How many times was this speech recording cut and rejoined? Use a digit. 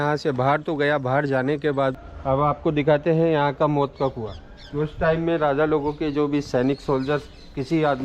1